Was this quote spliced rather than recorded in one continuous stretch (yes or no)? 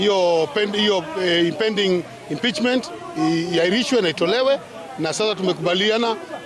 no